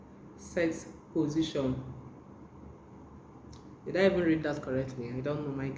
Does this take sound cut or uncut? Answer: uncut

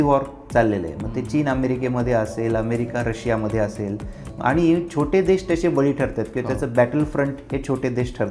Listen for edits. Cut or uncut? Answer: uncut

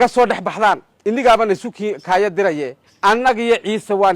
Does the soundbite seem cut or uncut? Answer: cut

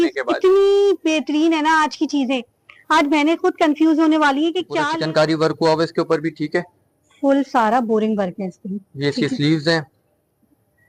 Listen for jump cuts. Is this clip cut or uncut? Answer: cut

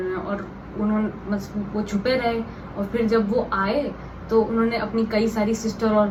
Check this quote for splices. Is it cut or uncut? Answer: uncut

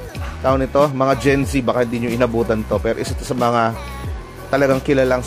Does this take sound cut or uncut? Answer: uncut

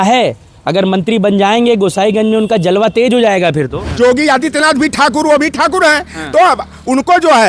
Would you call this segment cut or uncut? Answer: cut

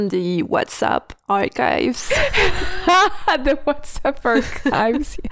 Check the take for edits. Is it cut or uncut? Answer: uncut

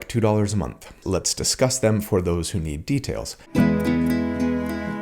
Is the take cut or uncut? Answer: cut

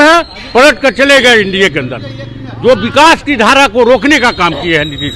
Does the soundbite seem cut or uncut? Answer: uncut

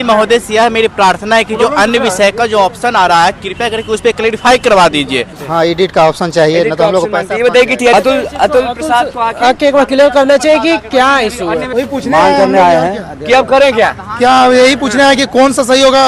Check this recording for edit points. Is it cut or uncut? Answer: cut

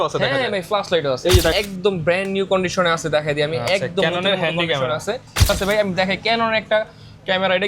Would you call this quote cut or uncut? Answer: cut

